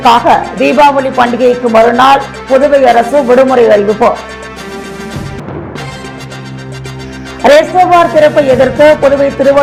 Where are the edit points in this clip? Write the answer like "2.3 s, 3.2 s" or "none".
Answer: none